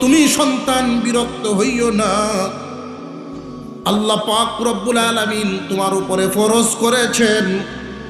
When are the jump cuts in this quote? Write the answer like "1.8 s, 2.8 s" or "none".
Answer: 2.5 s, 3.8 s